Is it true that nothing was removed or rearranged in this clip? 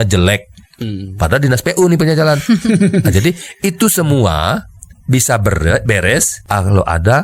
no; 1 cut; at 6.4 s

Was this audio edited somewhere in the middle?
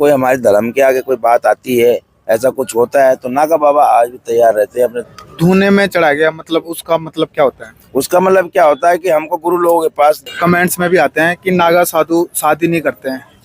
yes; 2 cuts; at 5.0 s, 10.3 s

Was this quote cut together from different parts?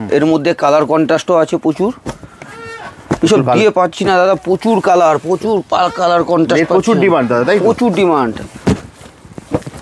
no; 0 cuts

